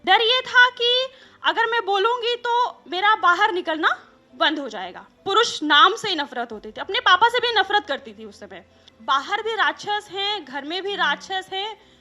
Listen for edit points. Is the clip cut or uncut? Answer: cut